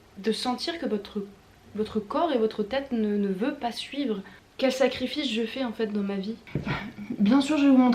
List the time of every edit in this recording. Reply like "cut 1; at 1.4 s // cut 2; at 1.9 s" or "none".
cut 1; at 4.4 s // cut 2; at 6.4 s